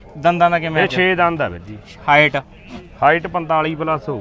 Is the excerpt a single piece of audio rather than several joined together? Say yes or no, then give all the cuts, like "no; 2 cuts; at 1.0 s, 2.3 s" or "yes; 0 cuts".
yes; 0 cuts